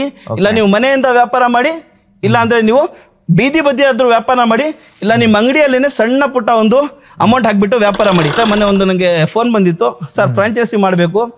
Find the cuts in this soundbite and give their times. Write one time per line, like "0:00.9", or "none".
0:08.4